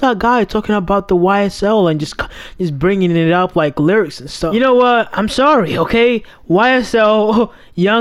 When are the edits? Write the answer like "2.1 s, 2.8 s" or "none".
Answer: 4.5 s